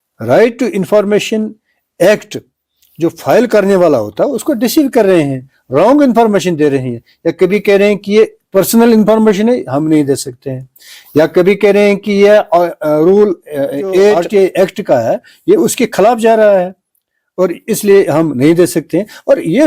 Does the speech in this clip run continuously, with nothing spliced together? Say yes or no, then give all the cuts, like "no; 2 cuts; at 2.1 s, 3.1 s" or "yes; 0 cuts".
no; 1 cut; at 14.2 s